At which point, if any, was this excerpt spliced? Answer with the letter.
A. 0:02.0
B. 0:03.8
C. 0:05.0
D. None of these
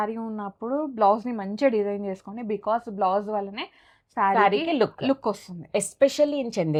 D